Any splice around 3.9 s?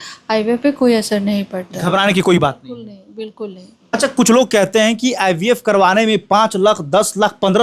yes; 1 cut; at 3.9 s

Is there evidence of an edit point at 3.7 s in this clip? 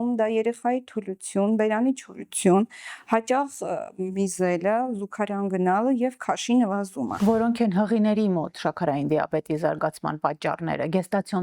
no; 1 cut; at 7.1 s

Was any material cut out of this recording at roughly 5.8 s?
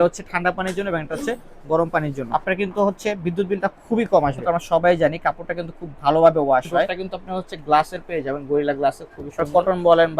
no; 4 cuts; at 2.2 s, 4.4 s, 7.1 s, 9.4 s

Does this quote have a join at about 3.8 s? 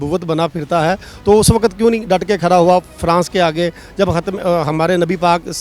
no; 0 cuts

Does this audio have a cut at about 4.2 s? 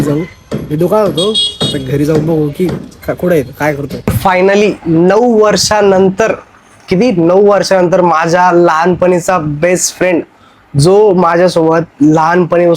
yes; 1 cut; at 4.2 s

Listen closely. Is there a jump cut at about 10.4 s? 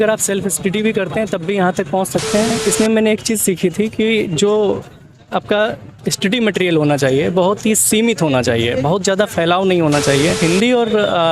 yes; 2 cuts; at 2.6 s, 10.4 s

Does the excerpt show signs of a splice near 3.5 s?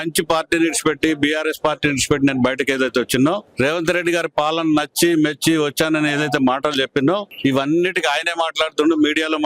yes; 2 cuts; at 3.5 s, 7.3 s

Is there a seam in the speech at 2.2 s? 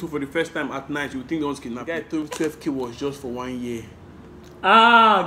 yes; 1 cut; at 2.2 s

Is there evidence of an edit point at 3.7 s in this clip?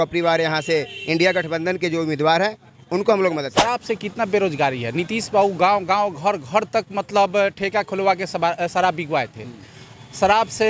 yes; 1 cut; at 3.7 s

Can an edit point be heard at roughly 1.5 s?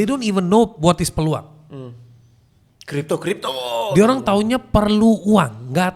no; 0 cuts

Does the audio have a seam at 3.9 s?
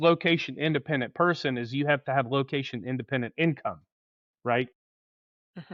no; 0 cuts

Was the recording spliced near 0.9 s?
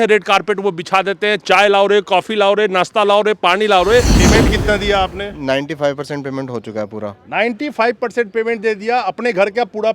no; 1 cut; at 4.2 s

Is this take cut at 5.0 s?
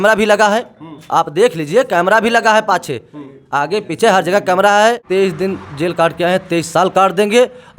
yes; 1 cut; at 5.0 s

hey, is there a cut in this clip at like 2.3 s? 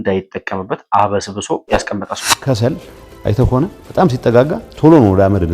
yes; 1 cut; at 2.3 s

